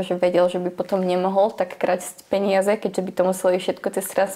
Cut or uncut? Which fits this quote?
uncut